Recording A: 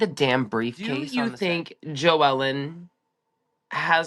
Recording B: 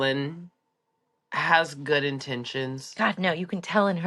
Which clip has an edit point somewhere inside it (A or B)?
A